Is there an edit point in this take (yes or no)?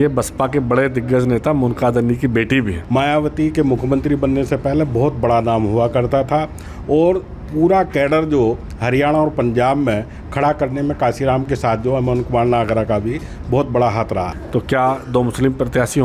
yes